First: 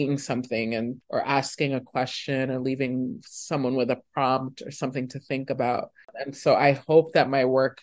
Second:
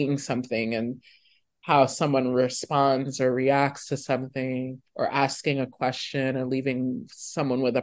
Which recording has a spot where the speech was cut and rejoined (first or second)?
first